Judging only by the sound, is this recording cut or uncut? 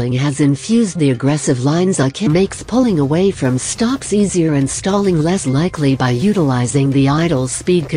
uncut